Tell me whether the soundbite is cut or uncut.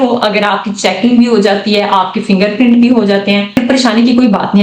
cut